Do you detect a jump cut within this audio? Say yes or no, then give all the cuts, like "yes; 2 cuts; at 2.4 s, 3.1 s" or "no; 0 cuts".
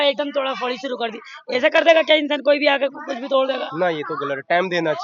no; 0 cuts